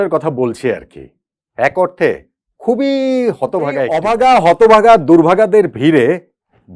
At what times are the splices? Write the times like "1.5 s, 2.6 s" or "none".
3.9 s